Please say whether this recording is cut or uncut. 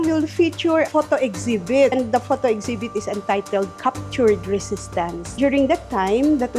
cut